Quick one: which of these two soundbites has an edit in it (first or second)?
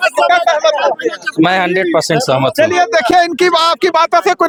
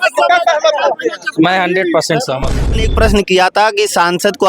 second